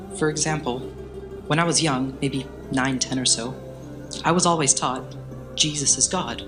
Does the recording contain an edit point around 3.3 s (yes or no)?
no